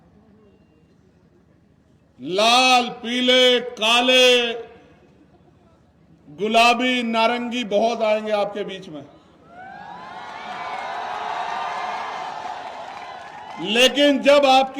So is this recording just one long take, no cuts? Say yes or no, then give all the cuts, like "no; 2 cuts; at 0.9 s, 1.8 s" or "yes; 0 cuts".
yes; 0 cuts